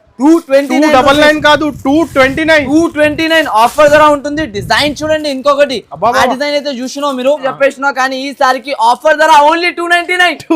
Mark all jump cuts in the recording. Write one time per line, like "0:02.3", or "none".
0:07.5